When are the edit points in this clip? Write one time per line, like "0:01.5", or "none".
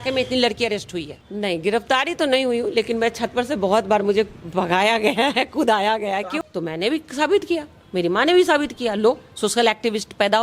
0:01.2
0:06.3